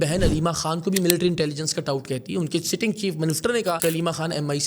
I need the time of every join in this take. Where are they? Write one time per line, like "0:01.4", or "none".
0:03.8

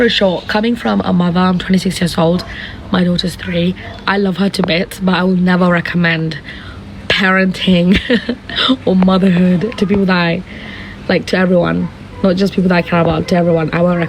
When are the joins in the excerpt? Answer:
none

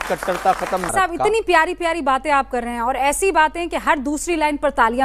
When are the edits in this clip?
0:00.9

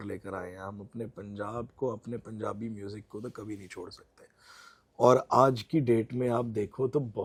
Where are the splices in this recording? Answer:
none

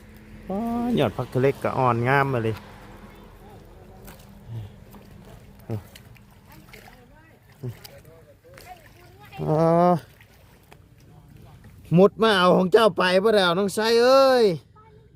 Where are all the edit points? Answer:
none

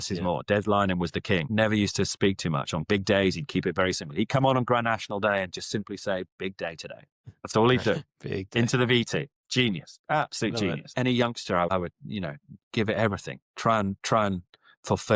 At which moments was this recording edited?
0:01.5
0:10.9

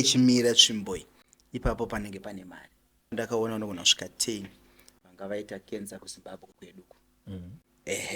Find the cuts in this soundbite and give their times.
0:03.1

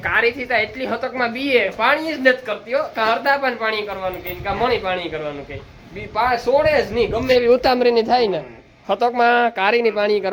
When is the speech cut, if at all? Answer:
none

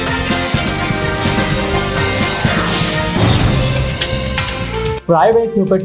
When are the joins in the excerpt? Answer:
none

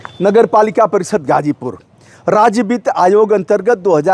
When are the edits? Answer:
none

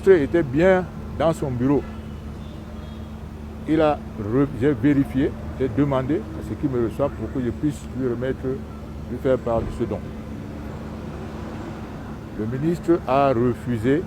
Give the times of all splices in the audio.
none

